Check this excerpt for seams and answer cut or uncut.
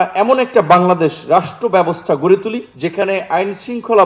cut